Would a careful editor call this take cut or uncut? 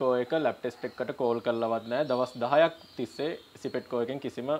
uncut